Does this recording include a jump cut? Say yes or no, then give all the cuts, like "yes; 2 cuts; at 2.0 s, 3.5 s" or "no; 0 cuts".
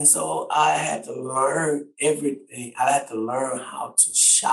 no; 0 cuts